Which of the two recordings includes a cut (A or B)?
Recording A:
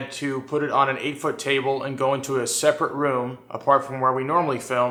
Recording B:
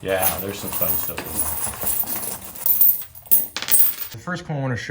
B